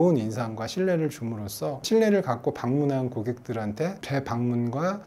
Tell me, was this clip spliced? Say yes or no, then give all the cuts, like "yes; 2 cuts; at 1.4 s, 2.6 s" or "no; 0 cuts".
no; 0 cuts